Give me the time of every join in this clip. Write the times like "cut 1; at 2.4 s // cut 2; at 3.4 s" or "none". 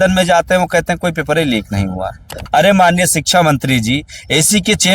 cut 1; at 2.4 s